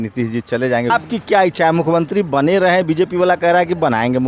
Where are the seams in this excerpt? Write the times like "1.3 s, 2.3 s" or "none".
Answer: 0.9 s